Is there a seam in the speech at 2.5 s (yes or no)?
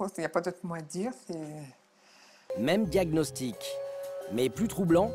yes